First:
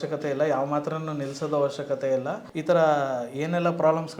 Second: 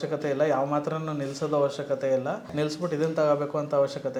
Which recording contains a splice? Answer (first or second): first